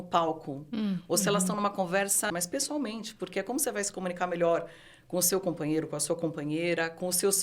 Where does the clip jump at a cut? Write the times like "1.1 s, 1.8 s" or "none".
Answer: 2.3 s